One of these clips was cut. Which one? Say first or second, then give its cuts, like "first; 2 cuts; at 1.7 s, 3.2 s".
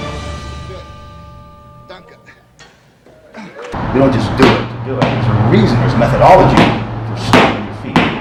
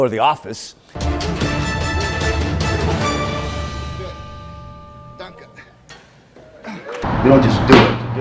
second; 1 cut; at 1.0 s